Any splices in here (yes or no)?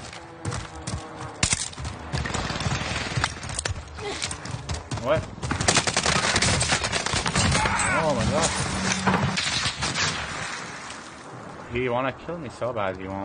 yes